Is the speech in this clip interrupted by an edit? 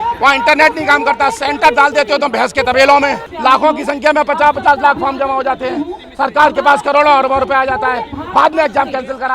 yes; 1 cut; at 3.3 s

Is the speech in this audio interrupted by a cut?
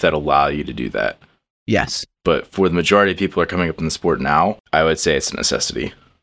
yes; 1 cut; at 4.6 s

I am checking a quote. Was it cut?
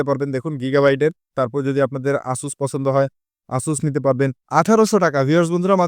yes; 2 cuts; at 1.3 s, 4.4 s

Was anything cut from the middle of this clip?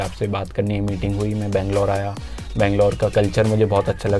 no; 0 cuts

